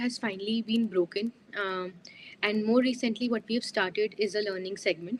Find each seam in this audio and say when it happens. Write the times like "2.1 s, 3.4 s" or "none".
none